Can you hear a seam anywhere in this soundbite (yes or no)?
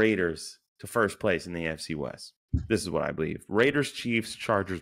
no